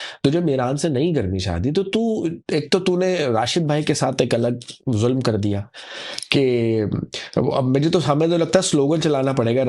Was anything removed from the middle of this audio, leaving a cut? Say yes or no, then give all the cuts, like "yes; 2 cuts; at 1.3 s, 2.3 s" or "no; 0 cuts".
no; 0 cuts